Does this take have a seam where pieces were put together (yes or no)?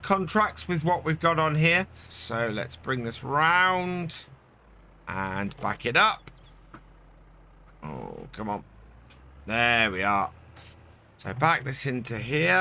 yes